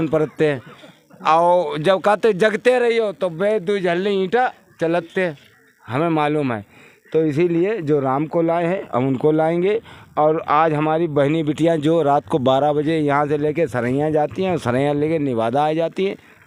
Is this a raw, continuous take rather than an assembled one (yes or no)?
yes